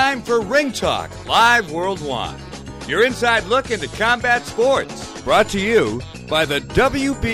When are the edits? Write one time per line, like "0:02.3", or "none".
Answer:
0:05.1